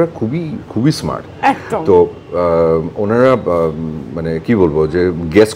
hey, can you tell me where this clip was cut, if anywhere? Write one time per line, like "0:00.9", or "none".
none